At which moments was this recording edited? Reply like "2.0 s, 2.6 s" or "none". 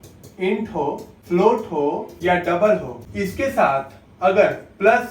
1.1 s, 2.1 s, 3.0 s